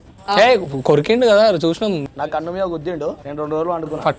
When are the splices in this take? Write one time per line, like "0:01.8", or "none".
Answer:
0:02.1
0:03.2